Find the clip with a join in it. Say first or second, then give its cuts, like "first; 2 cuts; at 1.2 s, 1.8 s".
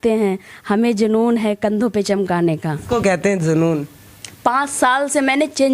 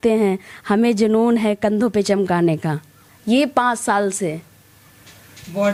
first; 1 cut; at 2.8 s